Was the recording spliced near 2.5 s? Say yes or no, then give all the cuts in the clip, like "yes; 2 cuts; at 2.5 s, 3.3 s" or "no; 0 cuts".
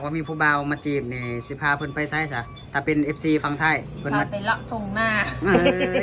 no; 1 cut; at 3.9 s